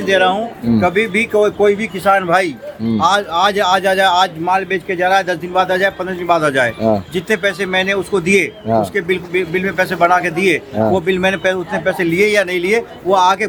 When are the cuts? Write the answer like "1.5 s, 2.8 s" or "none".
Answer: none